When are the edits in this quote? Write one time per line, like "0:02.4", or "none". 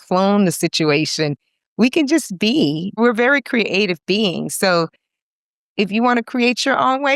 0:03.0